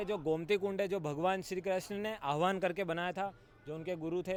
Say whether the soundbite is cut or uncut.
uncut